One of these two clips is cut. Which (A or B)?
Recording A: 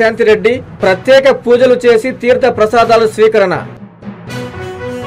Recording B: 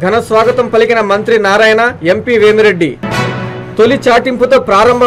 A